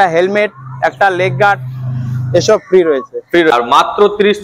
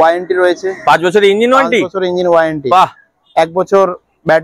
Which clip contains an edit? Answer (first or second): first